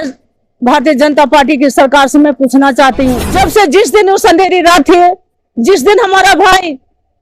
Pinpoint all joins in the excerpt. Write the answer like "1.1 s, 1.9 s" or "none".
3.2 s